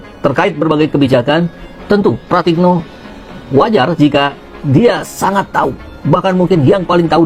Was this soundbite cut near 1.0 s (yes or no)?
no